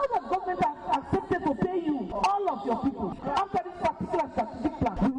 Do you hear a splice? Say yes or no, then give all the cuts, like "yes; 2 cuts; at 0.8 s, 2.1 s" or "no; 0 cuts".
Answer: yes; 1 cut; at 3.2 s